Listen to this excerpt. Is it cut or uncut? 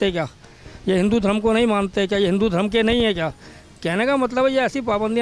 uncut